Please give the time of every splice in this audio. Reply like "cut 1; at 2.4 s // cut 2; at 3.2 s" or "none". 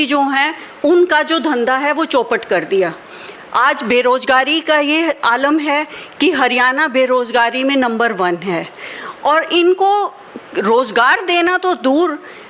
none